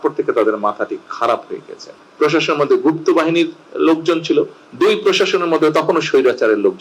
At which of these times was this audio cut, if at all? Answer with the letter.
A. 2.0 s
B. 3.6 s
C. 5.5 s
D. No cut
A